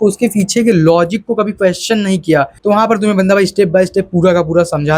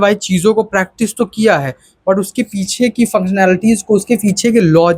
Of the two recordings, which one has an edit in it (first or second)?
first